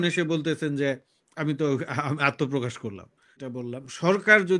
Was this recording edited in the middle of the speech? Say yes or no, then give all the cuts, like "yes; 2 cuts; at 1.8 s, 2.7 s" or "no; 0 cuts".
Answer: yes; 1 cut; at 3.4 s